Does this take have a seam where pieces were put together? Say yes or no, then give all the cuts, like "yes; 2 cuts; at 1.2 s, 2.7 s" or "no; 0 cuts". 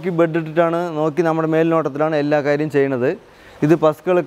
no; 0 cuts